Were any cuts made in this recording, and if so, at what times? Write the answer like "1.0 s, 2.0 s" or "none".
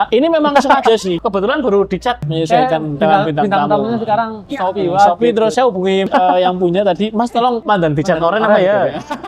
1.2 s, 2.3 s, 4.4 s, 5.8 s, 7.6 s